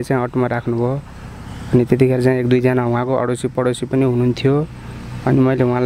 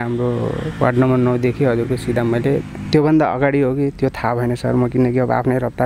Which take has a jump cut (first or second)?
second